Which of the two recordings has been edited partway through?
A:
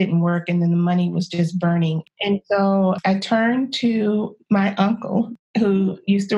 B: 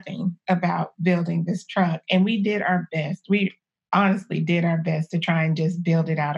A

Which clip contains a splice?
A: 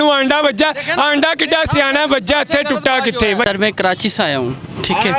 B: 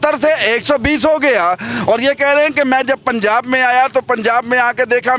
A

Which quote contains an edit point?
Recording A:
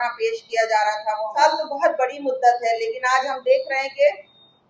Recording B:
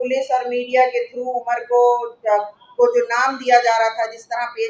A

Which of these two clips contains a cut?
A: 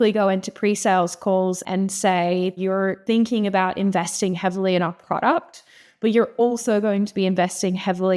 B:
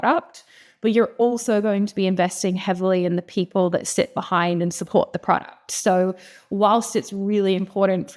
A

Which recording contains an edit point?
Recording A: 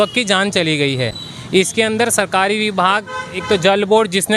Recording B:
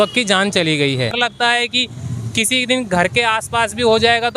B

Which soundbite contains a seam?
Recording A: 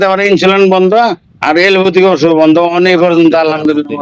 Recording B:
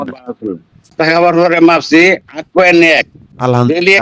B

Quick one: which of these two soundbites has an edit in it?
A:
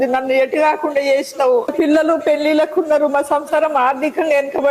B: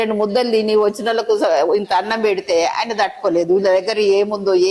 A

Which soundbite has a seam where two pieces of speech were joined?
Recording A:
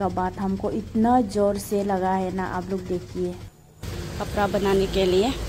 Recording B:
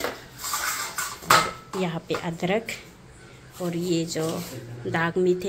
A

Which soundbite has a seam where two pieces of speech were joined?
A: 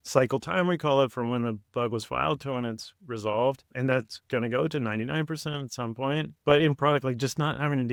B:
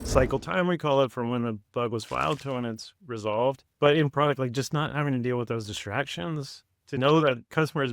B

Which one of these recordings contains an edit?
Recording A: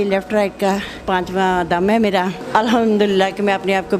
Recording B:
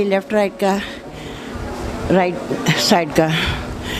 A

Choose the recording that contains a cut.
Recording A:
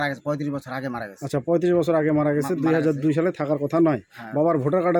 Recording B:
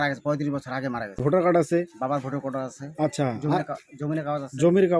B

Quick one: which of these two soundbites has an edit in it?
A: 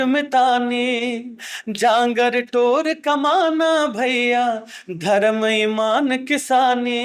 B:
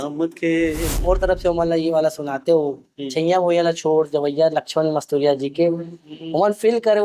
B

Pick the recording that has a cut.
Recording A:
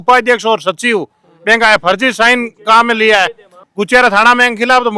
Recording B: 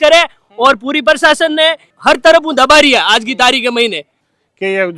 B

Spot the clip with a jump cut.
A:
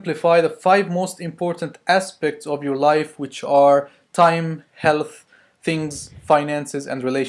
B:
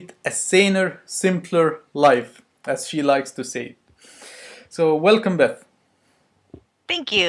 B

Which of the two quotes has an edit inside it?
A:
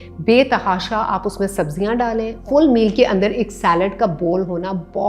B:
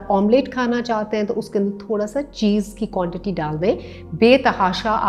A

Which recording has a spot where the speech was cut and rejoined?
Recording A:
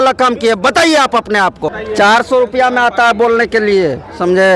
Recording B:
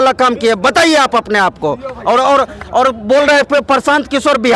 A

